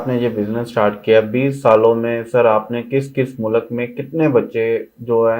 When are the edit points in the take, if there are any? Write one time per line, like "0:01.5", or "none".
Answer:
none